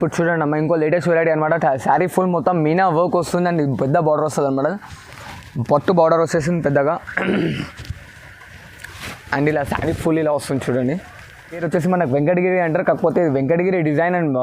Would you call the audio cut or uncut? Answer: cut